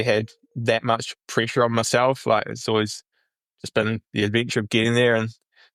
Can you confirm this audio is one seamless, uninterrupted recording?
yes; 0 cuts

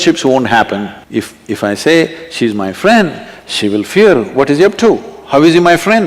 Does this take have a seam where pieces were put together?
yes; 1 cut; at 0.9 s

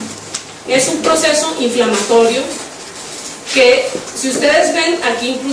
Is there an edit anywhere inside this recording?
no; 0 cuts

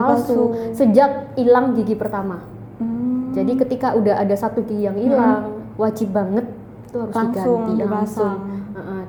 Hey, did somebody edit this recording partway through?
no; 0 cuts

